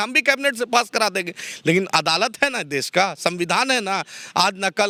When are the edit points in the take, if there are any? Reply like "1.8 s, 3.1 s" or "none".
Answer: none